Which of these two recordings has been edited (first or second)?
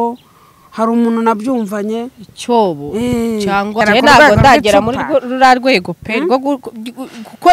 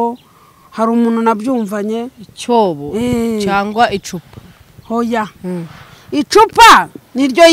first